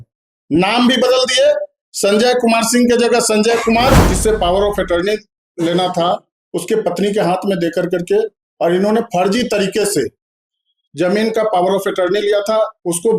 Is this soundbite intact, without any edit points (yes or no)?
no